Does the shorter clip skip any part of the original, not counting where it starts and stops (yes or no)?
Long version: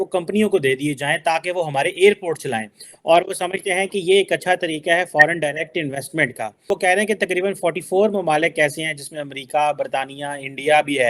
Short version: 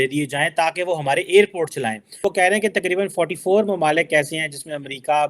yes